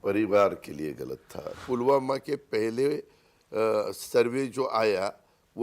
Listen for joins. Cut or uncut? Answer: cut